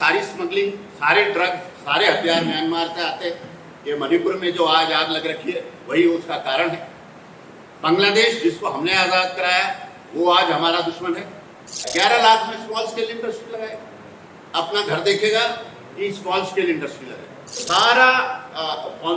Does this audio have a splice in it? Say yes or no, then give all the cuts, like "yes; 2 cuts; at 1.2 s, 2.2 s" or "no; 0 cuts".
yes; 2 cuts; at 11.8 s, 17.6 s